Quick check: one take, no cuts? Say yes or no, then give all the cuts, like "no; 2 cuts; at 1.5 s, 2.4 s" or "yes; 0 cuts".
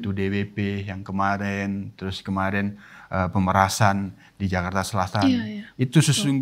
yes; 0 cuts